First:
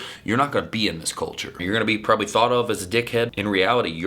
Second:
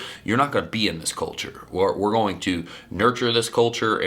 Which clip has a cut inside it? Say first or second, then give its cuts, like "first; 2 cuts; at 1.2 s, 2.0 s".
first; 2 cuts; at 1.6 s, 3.3 s